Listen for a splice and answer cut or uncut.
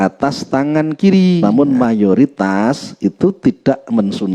cut